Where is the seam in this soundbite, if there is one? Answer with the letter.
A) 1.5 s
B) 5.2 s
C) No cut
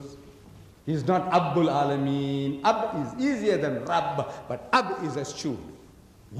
A